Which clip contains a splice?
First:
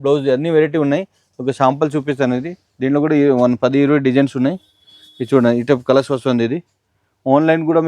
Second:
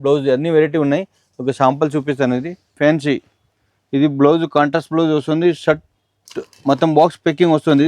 second; 1 cut; at 2.6 s

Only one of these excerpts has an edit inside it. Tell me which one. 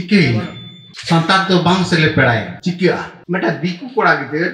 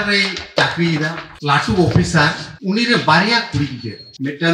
first; 1 cut; at 3.1 s

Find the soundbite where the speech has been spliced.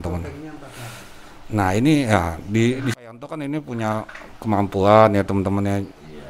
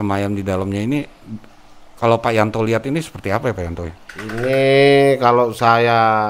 first; 1 cut; at 3.0 s

